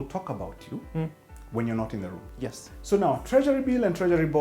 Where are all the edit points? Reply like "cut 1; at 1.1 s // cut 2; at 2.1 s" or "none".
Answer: cut 1; at 2.7 s